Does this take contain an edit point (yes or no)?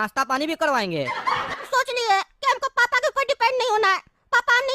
yes